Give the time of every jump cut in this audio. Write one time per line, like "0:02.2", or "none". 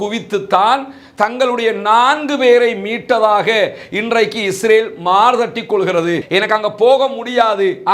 0:06.2